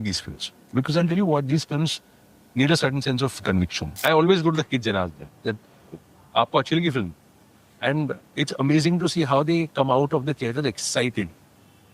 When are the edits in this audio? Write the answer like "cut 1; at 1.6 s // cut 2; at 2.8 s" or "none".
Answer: cut 1; at 3.9 s